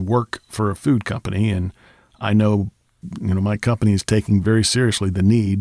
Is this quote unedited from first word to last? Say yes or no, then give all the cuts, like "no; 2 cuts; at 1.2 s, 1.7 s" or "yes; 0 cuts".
no; 1 cut; at 2.9 s